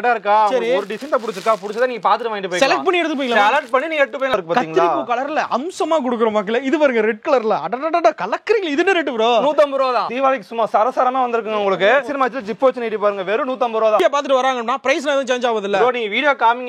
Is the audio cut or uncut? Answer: cut